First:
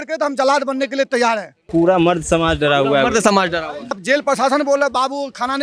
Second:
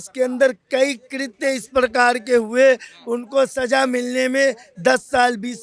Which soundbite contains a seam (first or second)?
first